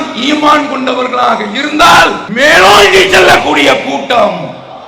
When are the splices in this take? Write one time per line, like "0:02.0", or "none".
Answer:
0:02.2